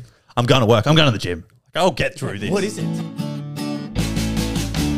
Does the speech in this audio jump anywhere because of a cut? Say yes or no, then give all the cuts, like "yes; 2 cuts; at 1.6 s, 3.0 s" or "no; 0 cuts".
yes; 1 cut; at 2.8 s